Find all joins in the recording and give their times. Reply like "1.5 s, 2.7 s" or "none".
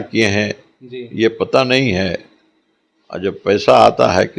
none